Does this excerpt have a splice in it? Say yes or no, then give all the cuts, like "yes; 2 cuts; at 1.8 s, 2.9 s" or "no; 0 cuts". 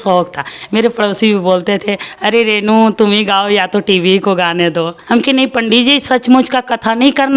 yes; 1 cut; at 5.0 s